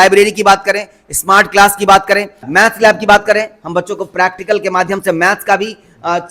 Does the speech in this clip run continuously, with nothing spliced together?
no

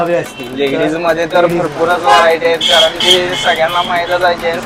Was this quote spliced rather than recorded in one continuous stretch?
no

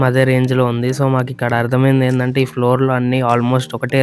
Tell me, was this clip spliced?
no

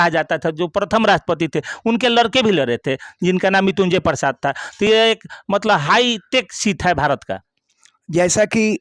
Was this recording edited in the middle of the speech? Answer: no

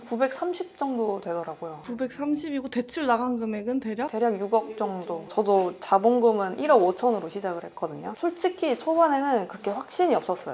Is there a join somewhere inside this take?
no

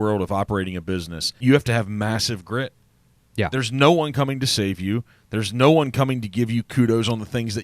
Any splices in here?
yes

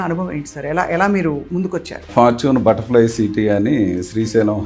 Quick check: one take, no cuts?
no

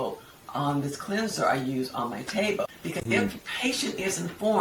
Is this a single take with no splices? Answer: no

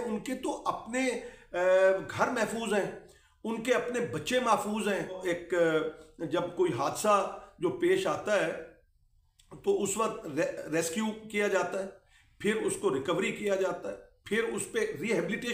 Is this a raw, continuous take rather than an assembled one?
no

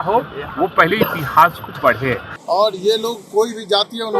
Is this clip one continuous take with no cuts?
no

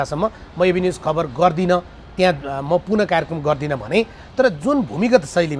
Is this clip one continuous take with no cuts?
no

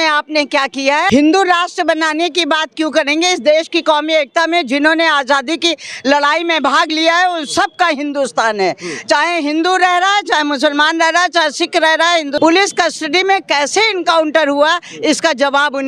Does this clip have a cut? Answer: yes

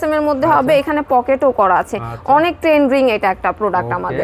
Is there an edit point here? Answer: no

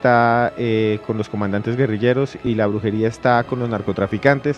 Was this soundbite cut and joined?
yes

